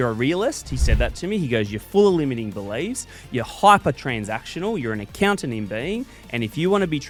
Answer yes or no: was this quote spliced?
no